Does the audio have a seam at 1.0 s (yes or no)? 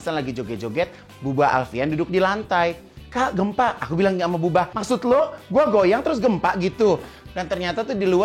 no